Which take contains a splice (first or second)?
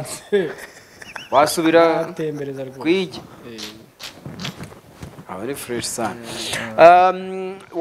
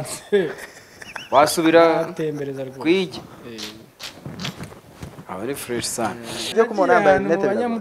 second